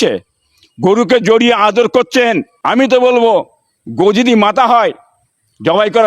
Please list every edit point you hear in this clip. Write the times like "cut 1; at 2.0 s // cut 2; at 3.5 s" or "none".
cut 1; at 2.5 s